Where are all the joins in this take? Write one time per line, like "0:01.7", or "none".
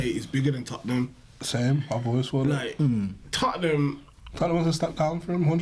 none